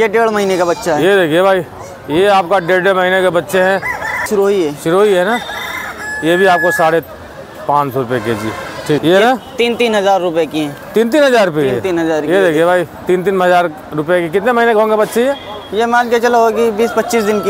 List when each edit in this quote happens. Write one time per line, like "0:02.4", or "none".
0:04.3
0:09.0